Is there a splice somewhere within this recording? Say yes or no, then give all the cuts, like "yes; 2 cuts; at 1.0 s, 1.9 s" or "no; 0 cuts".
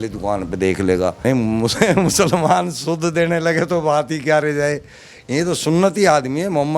yes; 1 cut; at 1.2 s